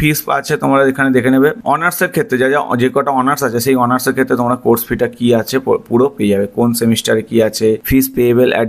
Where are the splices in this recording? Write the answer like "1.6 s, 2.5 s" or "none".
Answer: none